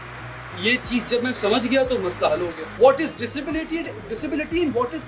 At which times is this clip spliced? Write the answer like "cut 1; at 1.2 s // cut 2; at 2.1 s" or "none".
cut 1; at 2.8 s